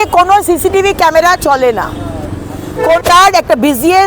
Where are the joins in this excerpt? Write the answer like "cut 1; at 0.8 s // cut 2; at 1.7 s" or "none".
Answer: cut 1; at 3.0 s